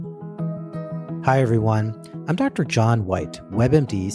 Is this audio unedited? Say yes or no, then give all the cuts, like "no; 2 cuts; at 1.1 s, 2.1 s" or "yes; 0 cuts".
no; 1 cut; at 1.2 s